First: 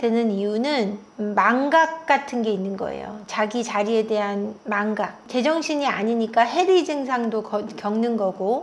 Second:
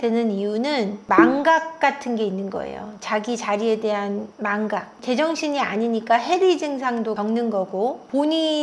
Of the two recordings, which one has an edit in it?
second; 2 cuts; at 1.0 s, 7.2 s

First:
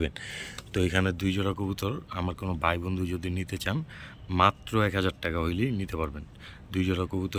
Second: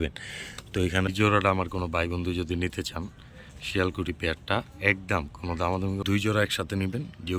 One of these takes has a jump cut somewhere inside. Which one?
second; 2 cuts; at 1.1 s, 6.0 s

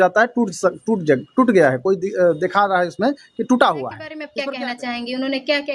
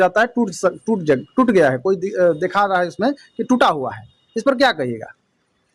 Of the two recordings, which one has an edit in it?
first; 1 cut; at 4.2 s

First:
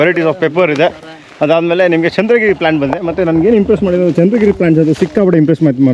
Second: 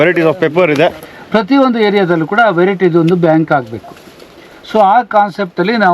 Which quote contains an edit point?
second; 1 cut; at 1.1 s

